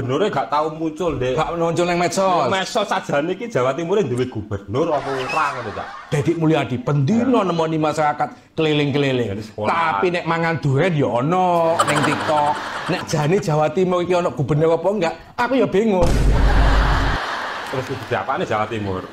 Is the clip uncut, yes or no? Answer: no